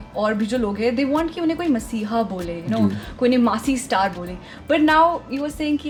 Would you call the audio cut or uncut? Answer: uncut